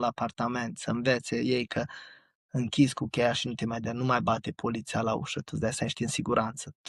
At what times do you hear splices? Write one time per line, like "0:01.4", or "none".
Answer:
none